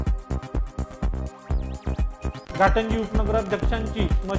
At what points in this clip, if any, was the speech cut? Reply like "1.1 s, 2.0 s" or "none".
1.4 s